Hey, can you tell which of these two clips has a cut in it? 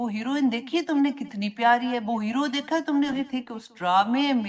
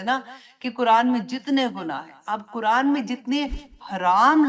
first; 1 cut; at 3.2 s

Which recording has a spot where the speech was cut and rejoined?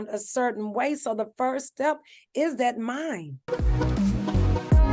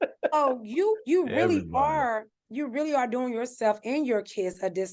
first; 1 cut; at 3.4 s

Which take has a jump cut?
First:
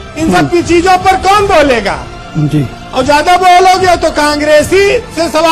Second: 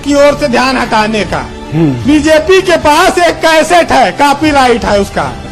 second; 1 cut; at 2.0 s

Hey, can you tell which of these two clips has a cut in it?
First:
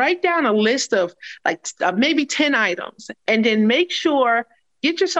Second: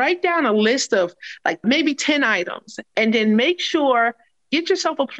second; 1 cut; at 1.6 s

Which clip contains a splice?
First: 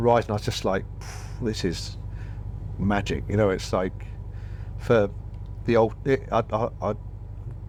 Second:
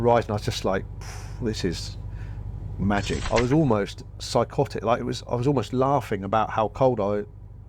second; 1 cut; at 3.2 s

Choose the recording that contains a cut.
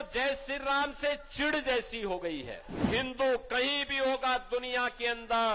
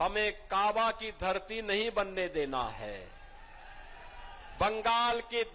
first; 1 cut; at 2.9 s

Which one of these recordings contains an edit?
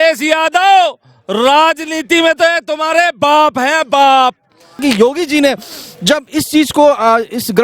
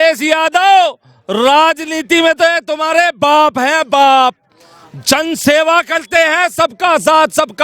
first; 1 cut; at 4.8 s

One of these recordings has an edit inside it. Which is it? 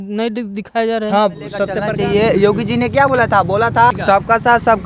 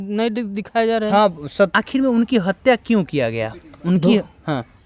first; 2 cuts; at 1.7 s, 3.9 s

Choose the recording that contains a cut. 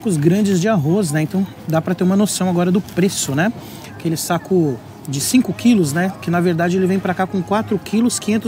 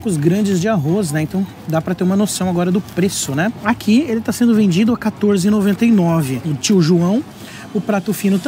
second; 2 cuts; at 3.6 s, 6.4 s

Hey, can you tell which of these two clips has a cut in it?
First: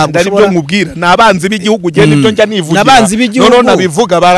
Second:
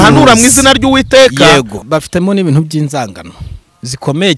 second; 1 cut; at 1.8 s

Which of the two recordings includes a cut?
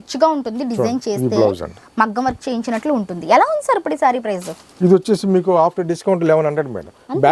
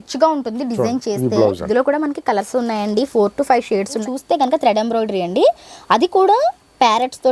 second; 2 cuts; at 1.6 s, 4.0 s

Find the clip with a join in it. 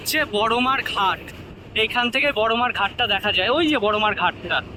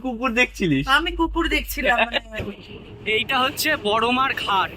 second; 1 cut; at 2.3 s

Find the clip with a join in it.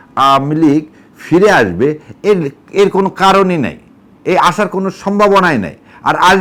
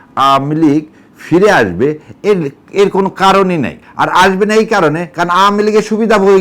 second; 1 cut; at 3.8 s

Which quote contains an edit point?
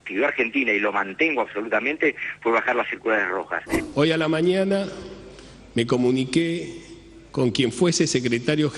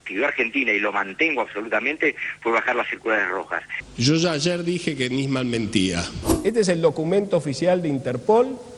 first; 1 cut; at 3.6 s

